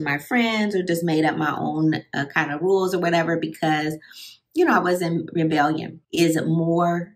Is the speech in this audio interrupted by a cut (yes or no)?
yes